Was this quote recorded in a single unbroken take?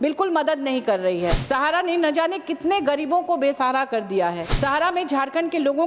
no; 2 cuts; at 1.4 s, 4.5 s

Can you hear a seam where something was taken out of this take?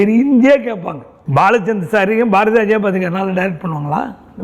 yes; 1 cut; at 1.2 s

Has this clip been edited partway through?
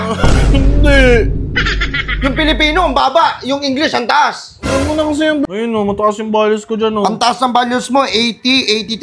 yes; 1 cut; at 5.5 s

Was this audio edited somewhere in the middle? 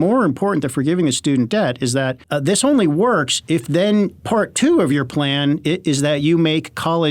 yes; 1 cut; at 2.2 s

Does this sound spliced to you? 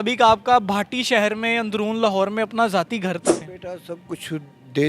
yes; 1 cut; at 3.5 s

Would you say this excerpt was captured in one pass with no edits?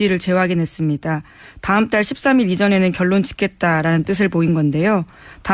yes; 0 cuts

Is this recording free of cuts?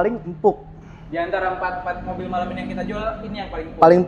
yes; 0 cuts

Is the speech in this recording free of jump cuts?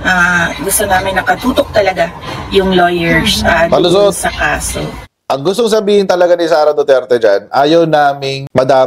no; 1 cut; at 5.1 s

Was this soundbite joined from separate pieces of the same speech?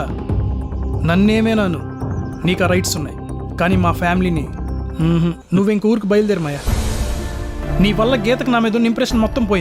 yes; 2 cuts; at 5.4 s, 7.6 s

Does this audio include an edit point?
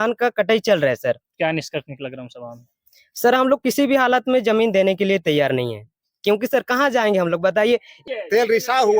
yes; 1 cut; at 7.9 s

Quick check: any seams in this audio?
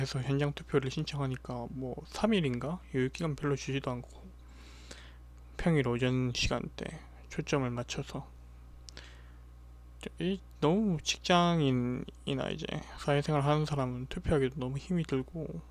yes; 1 cut; at 3.8 s

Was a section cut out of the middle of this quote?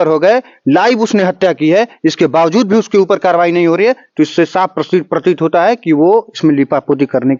no; 0 cuts

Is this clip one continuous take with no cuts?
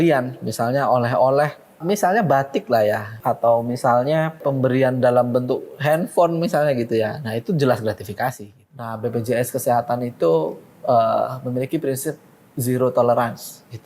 no; 4 cuts; at 1.8 s, 3.2 s, 4.4 s, 8.9 s

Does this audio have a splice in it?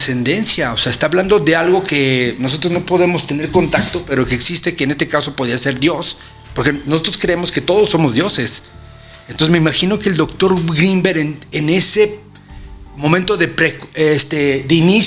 no; 0 cuts

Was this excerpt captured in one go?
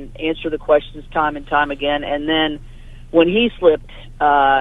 yes; 0 cuts

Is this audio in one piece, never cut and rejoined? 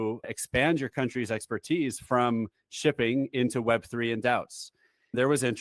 yes; 0 cuts

